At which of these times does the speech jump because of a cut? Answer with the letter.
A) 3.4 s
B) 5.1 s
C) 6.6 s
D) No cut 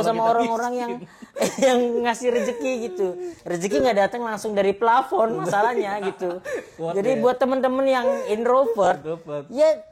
D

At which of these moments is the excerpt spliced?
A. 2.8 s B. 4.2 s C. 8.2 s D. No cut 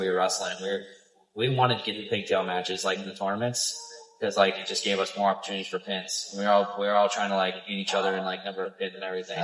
D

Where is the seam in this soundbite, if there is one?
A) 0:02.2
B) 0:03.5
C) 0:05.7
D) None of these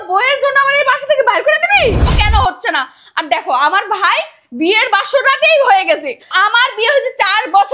A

